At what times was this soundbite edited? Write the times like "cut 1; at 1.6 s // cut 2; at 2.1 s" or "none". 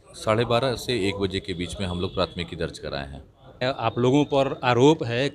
cut 1; at 3.6 s